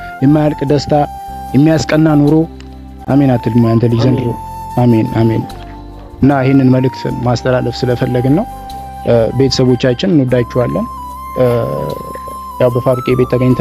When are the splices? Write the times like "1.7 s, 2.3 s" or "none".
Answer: none